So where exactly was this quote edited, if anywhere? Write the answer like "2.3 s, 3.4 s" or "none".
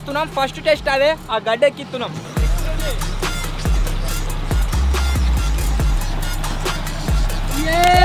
none